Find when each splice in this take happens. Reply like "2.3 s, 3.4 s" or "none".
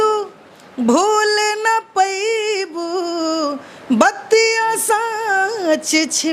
none